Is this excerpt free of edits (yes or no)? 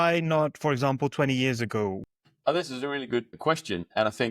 no